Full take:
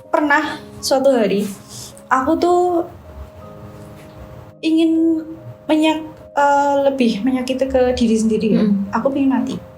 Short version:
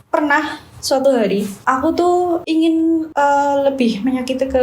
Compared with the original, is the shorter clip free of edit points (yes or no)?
no